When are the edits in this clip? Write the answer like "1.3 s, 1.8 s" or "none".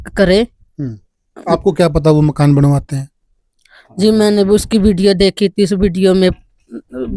none